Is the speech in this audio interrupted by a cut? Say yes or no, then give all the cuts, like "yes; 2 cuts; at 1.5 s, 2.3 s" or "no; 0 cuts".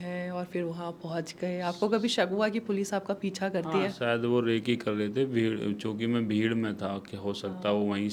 no; 0 cuts